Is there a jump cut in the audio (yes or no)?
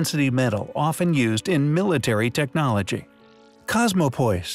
yes